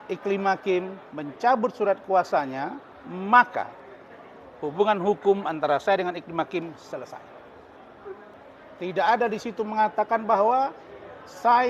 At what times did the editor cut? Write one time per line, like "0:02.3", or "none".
0:08.3

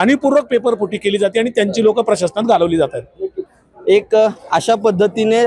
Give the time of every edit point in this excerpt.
none

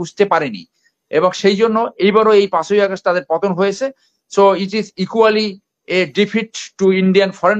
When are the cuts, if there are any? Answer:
none

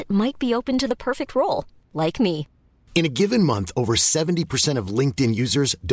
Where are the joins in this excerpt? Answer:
none

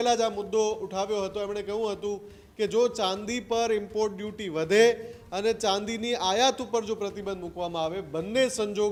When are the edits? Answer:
none

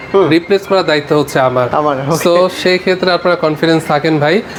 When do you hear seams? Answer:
none

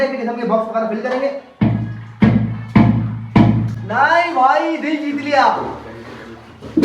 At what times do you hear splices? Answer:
none

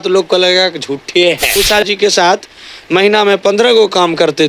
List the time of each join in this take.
0:01.6

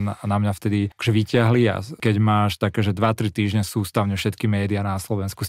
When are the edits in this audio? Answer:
0:01.0
0:02.0

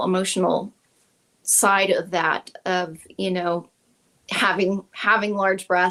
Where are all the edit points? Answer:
none

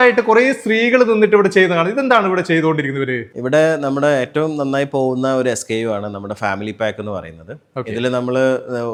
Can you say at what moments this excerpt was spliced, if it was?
none

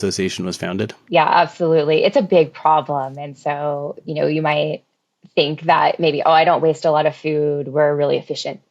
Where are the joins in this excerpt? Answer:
0:00.9

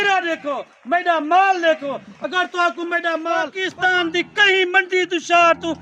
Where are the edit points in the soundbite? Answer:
0:03.6

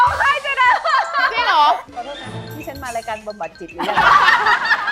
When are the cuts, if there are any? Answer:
0:01.9

